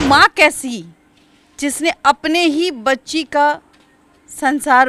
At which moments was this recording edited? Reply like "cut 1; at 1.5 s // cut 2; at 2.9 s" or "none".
none